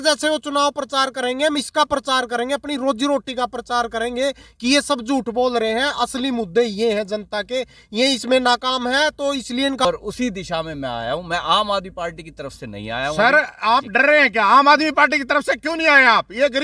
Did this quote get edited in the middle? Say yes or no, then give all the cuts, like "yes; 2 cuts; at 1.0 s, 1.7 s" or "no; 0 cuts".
yes; 1 cut; at 9.9 s